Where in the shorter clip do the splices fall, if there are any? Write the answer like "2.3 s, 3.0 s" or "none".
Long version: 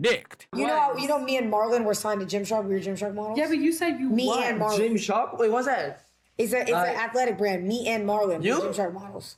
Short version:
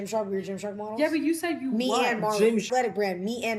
2.7 s